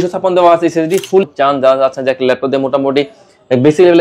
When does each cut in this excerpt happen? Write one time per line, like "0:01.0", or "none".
0:01.2